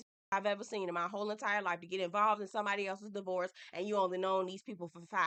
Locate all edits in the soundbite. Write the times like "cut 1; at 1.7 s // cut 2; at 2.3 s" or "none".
none